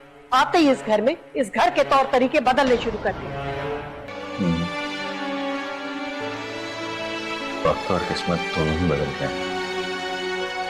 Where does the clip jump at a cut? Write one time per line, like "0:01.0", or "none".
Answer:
0:04.1

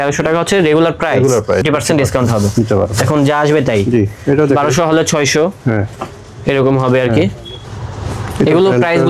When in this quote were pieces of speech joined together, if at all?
0:01.6
0:07.5

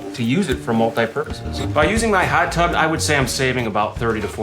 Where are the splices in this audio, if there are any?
0:01.7

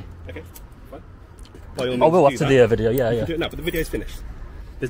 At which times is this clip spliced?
0:01.6

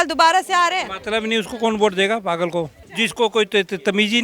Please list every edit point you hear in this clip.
0:02.8

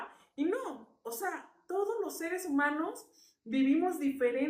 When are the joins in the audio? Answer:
none

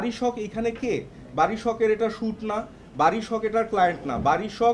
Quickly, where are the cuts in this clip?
none

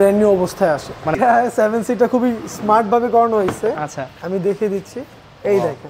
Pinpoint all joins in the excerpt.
0:01.2

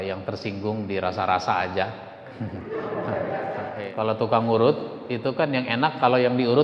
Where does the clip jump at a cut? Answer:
0:03.8

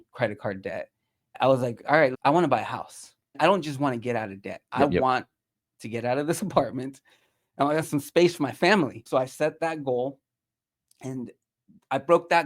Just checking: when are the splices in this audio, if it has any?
0:02.2
0:04.6

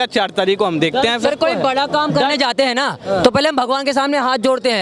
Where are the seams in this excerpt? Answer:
none

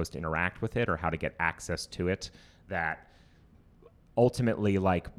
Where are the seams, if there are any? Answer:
none

